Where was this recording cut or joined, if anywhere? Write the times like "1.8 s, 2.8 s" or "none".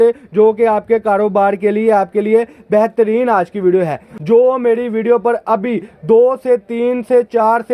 4.1 s